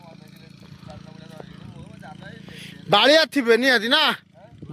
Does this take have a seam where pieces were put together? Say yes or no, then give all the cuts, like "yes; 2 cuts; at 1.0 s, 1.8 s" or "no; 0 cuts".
no; 0 cuts